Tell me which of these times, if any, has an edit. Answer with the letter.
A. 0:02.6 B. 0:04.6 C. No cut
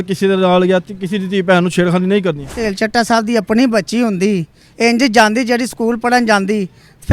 A